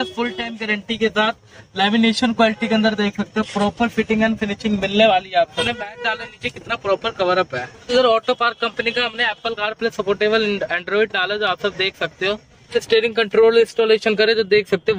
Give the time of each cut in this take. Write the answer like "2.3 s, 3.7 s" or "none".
5.6 s, 7.9 s, 12.8 s